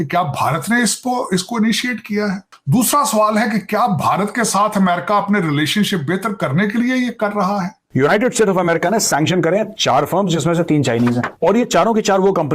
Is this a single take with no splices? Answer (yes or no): no